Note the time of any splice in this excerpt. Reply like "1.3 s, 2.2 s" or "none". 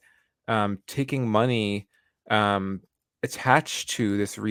none